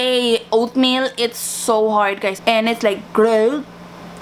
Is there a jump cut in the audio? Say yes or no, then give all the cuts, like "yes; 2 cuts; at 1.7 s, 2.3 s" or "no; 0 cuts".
yes; 1 cut; at 2.4 s